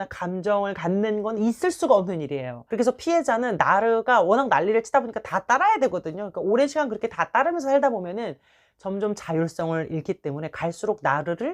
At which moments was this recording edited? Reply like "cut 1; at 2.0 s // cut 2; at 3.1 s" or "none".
none